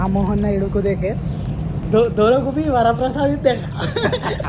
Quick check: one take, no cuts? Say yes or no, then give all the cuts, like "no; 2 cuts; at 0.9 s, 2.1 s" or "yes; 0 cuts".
yes; 0 cuts